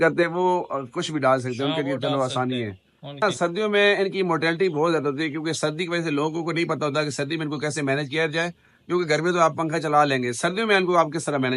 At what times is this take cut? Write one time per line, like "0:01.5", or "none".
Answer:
none